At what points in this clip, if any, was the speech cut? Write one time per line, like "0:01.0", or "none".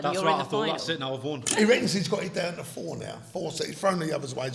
0:01.4